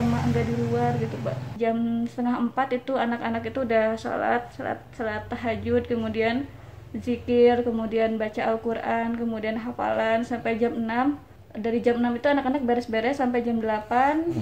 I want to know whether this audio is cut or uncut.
cut